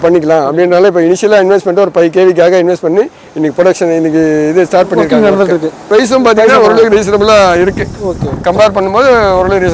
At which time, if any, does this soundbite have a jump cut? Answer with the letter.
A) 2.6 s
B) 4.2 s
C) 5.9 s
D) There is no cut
C